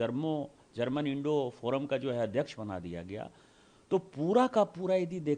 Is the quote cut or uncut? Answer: uncut